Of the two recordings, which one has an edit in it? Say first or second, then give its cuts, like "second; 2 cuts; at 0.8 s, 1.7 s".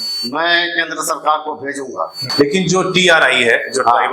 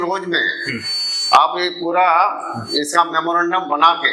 first; 1 cut; at 2.2 s